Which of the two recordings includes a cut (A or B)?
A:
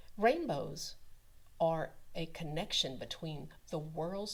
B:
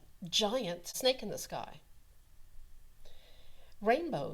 B